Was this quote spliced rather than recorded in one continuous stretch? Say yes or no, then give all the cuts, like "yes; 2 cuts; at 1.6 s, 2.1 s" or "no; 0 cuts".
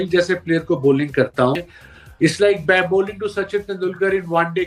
no; 0 cuts